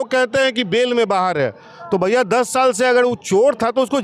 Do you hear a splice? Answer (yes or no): no